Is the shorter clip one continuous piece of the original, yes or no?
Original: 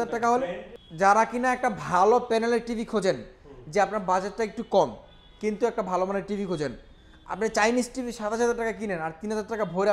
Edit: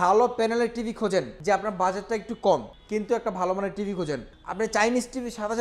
no